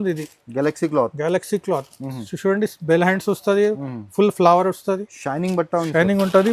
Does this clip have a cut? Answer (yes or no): no